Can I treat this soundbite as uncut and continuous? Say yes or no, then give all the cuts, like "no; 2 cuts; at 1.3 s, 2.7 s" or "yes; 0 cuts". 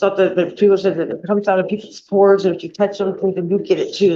yes; 0 cuts